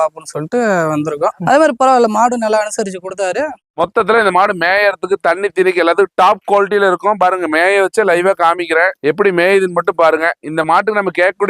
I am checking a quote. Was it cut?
yes; 2 cuts; at 1.4 s, 3.7 s

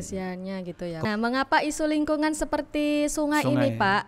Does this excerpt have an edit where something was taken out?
yes; 1 cut; at 1.1 s

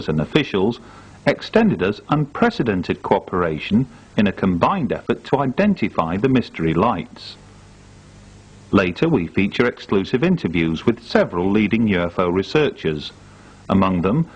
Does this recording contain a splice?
no; 0 cuts

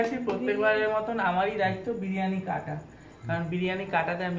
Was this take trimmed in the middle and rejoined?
no; 0 cuts

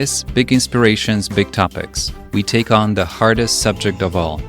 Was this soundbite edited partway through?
no; 0 cuts

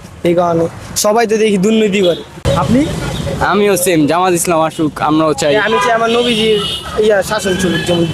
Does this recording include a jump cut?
yes; 1 cut; at 2.4 s

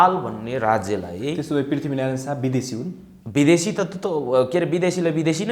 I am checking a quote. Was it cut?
no; 0 cuts

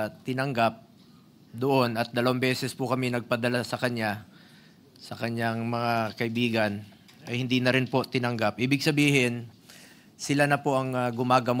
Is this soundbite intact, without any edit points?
yes; 0 cuts

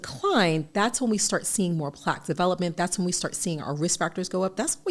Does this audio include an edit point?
no; 0 cuts

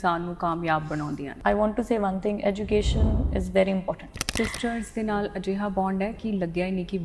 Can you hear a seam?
yes; 2 cuts; at 1.4 s, 4.2 s

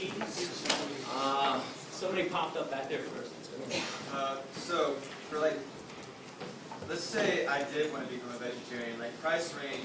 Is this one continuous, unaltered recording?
yes; 0 cuts

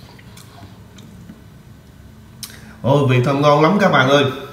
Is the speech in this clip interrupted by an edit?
no; 0 cuts

